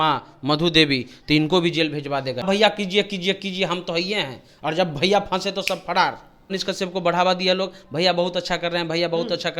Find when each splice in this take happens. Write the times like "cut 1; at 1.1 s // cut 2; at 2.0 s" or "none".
cut 1; at 2.5 s // cut 2; at 6.5 s